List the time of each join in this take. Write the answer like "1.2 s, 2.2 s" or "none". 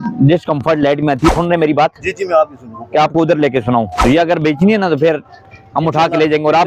1.3 s, 4.0 s